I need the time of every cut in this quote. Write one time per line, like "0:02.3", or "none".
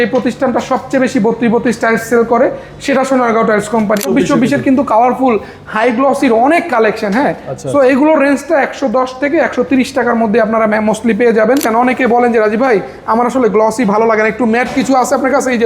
0:04.0
0:11.6